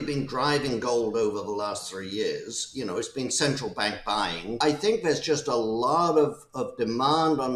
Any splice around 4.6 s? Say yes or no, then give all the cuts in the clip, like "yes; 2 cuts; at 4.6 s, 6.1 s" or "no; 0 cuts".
yes; 1 cut; at 4.6 s